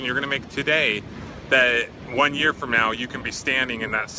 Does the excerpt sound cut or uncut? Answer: uncut